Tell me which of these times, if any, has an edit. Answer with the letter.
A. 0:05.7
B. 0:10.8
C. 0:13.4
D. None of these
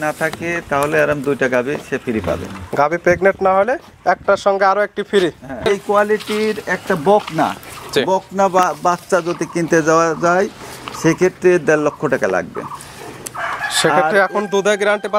A